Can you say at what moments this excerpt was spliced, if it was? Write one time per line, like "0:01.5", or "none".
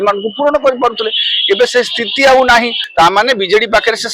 0:02.8